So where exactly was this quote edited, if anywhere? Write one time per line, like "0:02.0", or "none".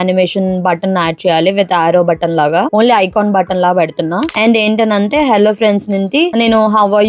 0:04.3